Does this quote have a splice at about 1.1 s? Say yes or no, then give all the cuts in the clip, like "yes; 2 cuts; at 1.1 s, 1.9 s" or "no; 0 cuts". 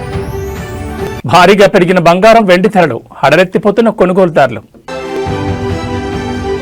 yes; 2 cuts; at 1.1 s, 5.0 s